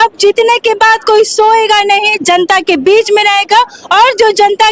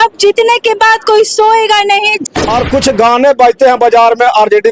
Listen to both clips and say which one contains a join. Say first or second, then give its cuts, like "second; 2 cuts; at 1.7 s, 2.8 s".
second; 1 cut; at 2.2 s